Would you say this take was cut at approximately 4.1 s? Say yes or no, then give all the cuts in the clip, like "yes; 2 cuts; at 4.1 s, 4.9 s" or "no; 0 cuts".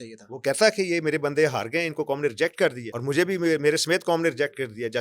no; 1 cut; at 2.9 s